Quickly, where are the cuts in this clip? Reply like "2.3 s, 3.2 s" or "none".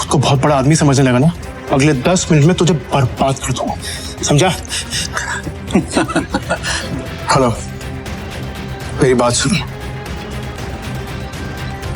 1.5 s, 6.7 s, 10.6 s